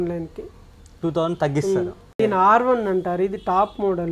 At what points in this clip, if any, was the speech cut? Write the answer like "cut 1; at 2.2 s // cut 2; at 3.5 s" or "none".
cut 1; at 2.0 s